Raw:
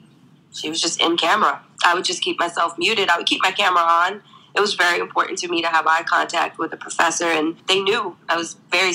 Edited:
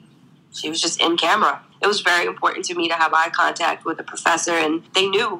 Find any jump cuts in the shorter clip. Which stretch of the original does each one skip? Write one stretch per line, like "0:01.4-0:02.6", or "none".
0:01.7-0:04.4